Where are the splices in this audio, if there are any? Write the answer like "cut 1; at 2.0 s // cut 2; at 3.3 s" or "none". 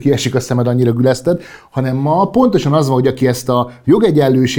none